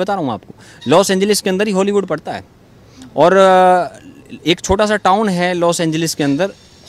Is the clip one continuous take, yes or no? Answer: yes